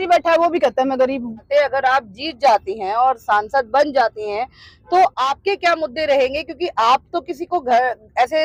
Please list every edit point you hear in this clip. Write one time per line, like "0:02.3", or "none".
none